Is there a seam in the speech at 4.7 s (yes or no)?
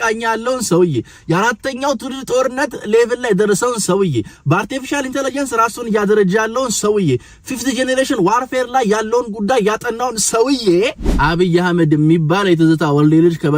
no